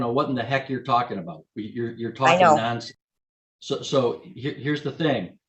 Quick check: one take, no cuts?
yes; 0 cuts

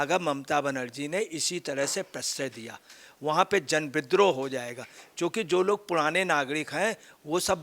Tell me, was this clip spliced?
no; 0 cuts

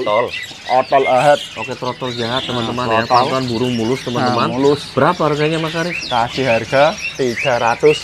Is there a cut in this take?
no; 0 cuts

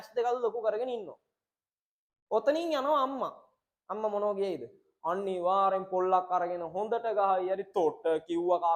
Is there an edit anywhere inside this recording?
no; 0 cuts

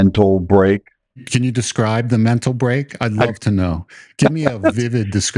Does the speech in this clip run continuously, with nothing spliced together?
no; 1 cut; at 1.2 s

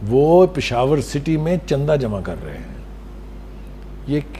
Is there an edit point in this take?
no; 0 cuts

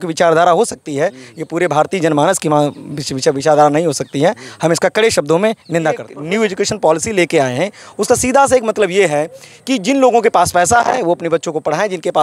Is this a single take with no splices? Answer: no; 1 cut; at 6.1 s

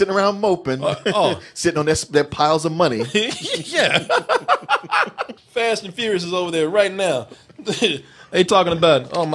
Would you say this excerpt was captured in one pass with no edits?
no; 1 cut; at 5.3 s

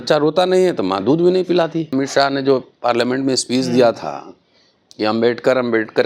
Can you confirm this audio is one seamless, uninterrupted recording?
no; 1 cut; at 1.9 s

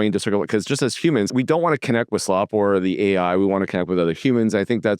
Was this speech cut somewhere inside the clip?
yes; 1 cut; at 1.3 s

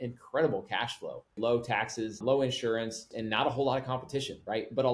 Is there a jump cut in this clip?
yes; 3 cuts; at 1.4 s, 2.2 s, 3.1 s

